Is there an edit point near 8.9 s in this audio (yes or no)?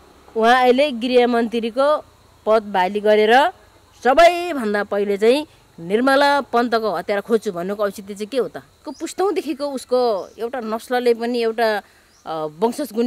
yes